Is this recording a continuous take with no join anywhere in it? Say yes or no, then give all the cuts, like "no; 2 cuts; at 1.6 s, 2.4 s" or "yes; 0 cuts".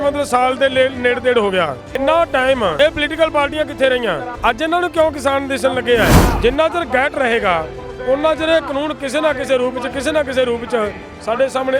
no; 4 cuts; at 2.0 s, 2.7 s, 4.3 s, 6.3 s